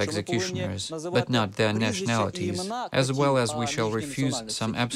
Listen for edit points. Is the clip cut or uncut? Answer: uncut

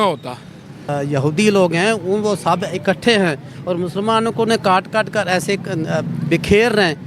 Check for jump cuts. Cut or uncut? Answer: cut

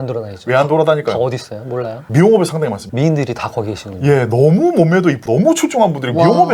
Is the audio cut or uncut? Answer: uncut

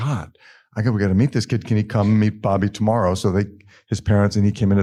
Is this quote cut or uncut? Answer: uncut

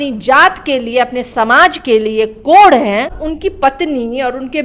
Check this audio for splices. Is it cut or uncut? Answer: cut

